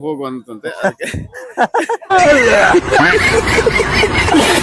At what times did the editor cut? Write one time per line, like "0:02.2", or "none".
none